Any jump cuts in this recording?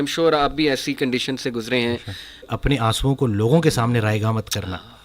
yes; 1 cut; at 2.5 s

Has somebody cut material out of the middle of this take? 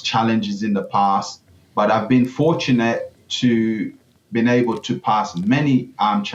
no; 0 cuts

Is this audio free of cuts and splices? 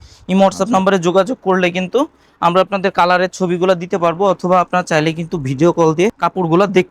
yes; 0 cuts

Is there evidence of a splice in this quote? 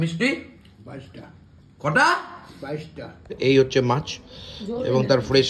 yes; 1 cut; at 3.3 s

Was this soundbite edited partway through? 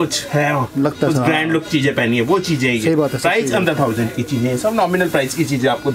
no; 0 cuts

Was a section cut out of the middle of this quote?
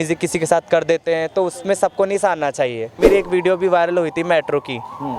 yes; 1 cut; at 3.0 s

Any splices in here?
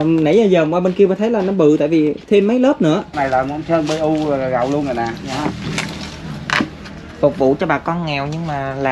yes; 1 cut; at 3.1 s

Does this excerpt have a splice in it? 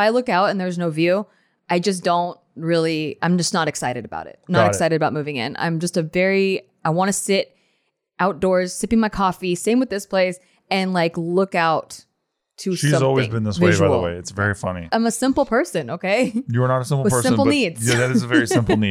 yes; 1 cut; at 14.9 s

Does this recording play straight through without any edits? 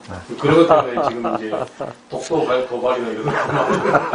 yes; 0 cuts

